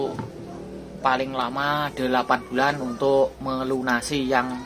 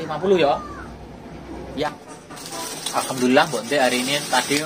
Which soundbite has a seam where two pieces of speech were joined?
second; 1 cut; at 1.9 s

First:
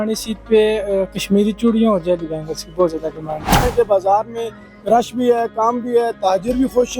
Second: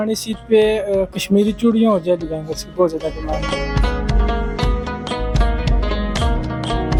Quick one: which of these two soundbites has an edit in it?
first; 1 cut; at 3.6 s

